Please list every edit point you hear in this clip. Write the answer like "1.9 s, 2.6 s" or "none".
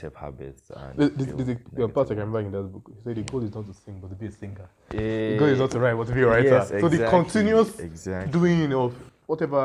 none